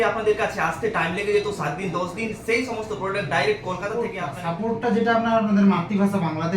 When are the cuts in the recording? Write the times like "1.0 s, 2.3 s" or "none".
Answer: 4.3 s